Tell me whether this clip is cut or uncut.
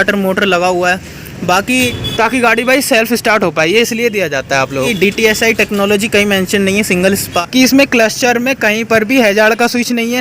cut